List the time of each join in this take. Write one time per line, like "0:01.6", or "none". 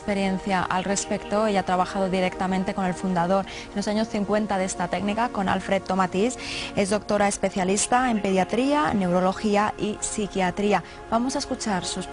0:11.0